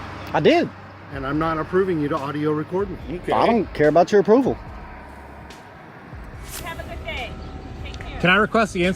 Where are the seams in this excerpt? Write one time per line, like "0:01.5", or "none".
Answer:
0:06.6